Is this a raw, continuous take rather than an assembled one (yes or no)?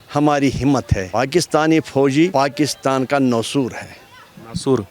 yes